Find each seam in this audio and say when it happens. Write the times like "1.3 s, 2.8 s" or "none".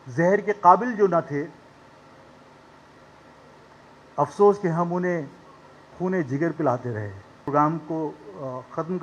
7.4 s